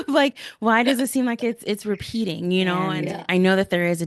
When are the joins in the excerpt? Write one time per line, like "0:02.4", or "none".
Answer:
0:03.0

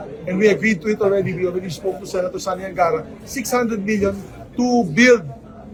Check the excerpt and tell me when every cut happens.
none

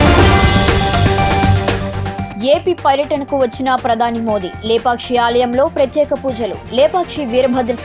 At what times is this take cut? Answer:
0:02.2

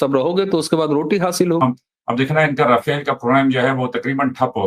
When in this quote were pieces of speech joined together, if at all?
0:01.6

